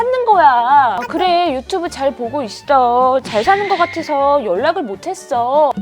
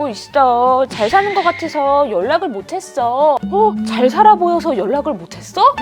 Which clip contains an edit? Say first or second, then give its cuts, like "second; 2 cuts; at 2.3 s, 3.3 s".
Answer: first; 1 cut; at 1.0 s